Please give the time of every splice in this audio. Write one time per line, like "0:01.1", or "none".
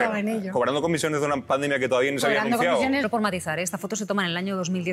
0:03.0